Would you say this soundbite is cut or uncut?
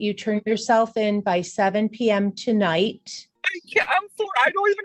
uncut